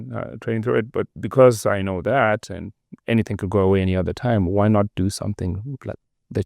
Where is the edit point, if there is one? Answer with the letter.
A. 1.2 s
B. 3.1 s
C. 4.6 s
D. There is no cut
A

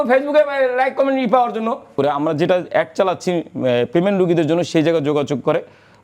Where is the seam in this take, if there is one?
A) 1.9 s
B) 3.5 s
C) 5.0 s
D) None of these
A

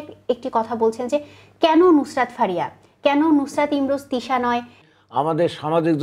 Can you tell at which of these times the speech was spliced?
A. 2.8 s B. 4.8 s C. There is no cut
B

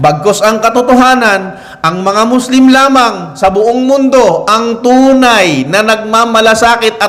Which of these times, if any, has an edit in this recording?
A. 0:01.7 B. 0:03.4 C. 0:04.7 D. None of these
D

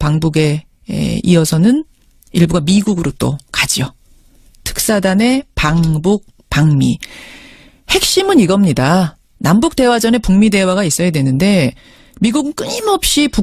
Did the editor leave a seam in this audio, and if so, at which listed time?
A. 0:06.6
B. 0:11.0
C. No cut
B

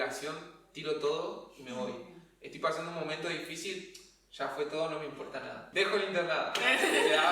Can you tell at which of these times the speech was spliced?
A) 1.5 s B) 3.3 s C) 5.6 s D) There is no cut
C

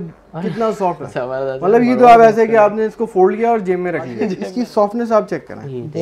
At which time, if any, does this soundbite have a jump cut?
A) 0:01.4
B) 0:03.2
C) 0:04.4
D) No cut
C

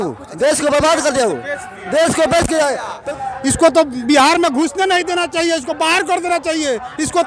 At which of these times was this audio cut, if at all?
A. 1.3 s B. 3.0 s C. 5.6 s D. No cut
B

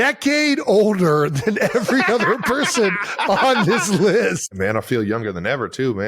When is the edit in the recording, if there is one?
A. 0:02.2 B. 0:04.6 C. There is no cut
B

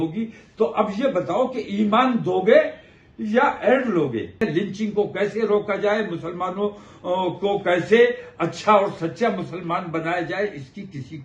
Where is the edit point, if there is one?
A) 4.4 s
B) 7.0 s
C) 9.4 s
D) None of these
A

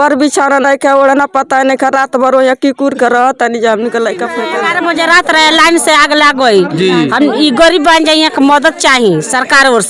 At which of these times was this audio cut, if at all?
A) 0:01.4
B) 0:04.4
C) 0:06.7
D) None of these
B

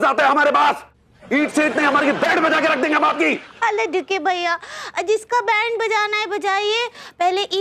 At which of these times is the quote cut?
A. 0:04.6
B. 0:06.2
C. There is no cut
C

